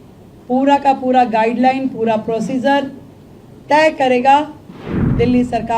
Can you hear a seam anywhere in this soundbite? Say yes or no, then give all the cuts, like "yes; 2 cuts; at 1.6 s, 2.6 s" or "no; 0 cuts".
yes; 1 cut; at 4.7 s